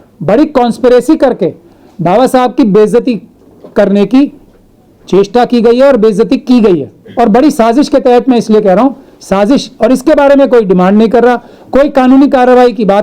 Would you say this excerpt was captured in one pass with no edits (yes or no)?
yes